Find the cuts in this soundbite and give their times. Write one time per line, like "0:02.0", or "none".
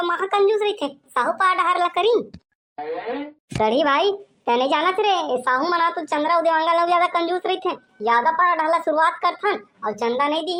none